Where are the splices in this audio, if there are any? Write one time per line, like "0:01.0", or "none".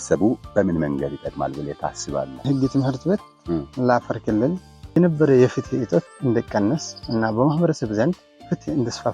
0:05.0